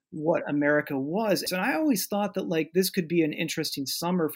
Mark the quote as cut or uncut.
cut